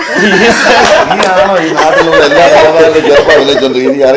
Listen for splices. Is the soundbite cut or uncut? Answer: uncut